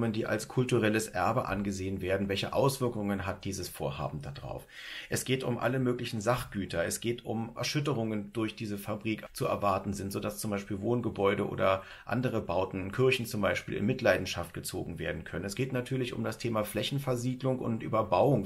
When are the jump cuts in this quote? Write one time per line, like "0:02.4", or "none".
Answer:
0:07.6
0:09.3